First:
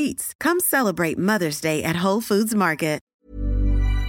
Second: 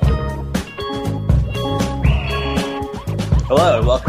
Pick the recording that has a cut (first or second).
first